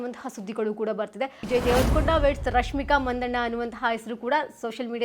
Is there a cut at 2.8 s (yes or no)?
no